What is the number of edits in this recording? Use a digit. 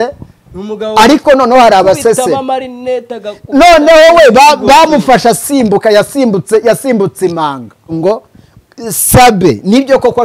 1